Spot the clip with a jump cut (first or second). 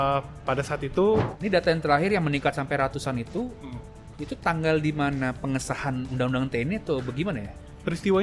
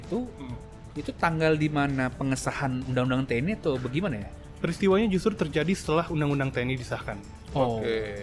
first